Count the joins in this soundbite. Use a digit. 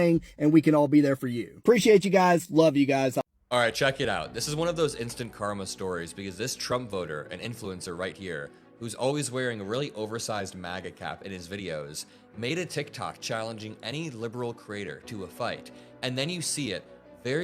1